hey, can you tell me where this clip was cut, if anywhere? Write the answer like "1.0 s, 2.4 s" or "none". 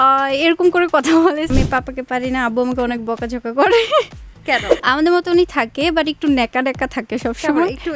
1.5 s, 4.7 s